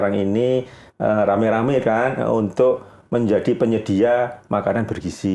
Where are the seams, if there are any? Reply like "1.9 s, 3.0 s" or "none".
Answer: none

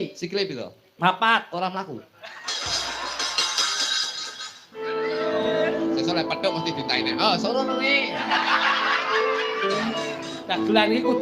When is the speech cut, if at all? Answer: 5.0 s

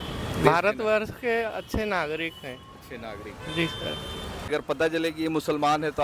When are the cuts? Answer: 4.5 s

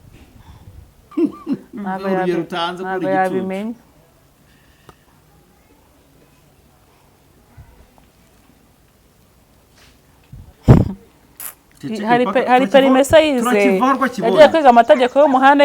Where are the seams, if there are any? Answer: 1.1 s

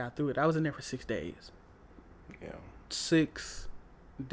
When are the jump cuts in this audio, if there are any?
1.7 s

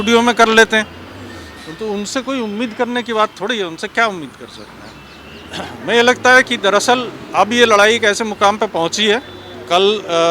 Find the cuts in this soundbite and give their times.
none

